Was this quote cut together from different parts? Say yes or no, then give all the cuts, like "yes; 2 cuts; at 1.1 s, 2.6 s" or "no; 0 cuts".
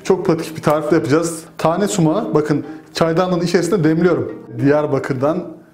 yes; 2 cuts; at 1.4 s, 4.5 s